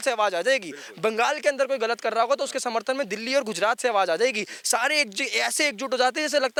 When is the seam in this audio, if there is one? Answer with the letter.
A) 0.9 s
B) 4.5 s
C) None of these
C